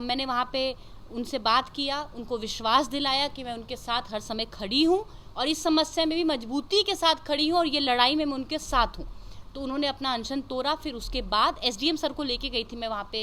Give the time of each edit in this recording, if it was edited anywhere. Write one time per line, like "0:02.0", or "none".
none

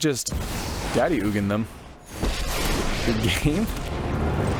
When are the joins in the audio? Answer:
none

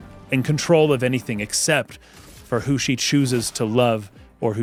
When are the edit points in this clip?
none

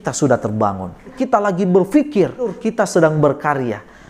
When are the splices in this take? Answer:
0:01.1
0:02.6

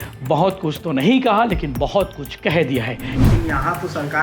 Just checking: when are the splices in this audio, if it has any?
0:03.2

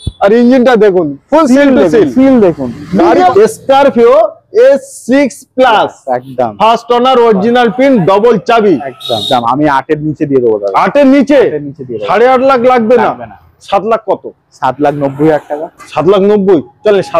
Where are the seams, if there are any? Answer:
0:03.3
0:09.2

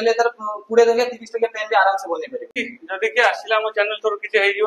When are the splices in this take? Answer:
0:02.6

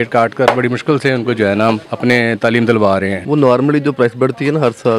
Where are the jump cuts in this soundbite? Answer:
0:01.9
0:03.2

